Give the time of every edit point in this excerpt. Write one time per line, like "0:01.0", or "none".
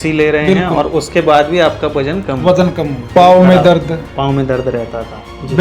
0:03.0